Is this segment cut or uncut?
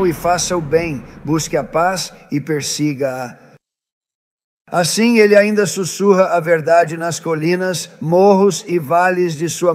uncut